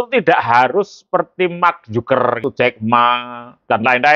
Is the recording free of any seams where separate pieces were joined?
no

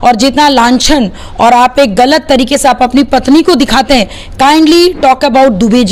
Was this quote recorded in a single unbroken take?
yes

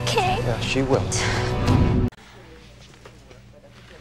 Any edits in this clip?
yes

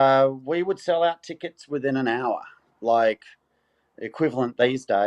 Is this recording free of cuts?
yes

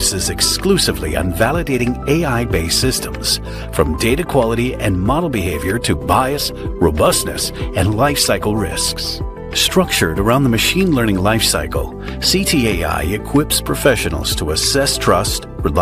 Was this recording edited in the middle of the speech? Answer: no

